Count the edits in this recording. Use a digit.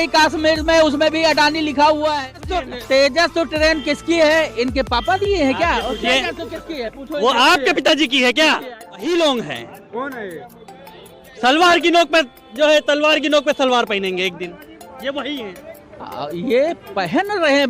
2